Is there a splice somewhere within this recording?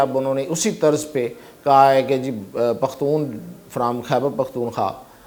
no; 0 cuts

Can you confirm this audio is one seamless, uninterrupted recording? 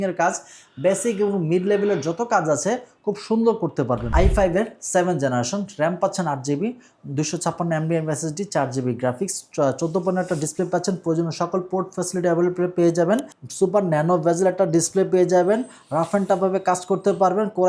no; 2 cuts; at 4.1 s, 13.4 s

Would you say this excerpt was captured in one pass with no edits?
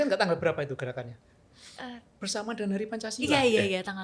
no; 1 cut; at 2.2 s

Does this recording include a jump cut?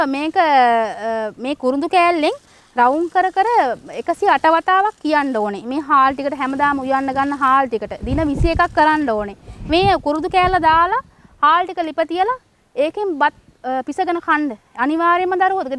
no; 0 cuts

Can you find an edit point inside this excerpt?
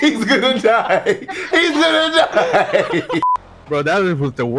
yes; 1 cut; at 3.3 s

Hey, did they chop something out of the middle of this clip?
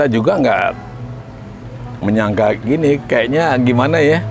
no; 0 cuts

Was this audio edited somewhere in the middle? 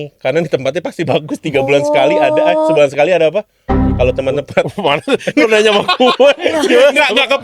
no; 0 cuts

